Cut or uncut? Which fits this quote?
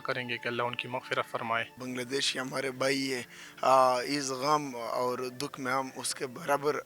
cut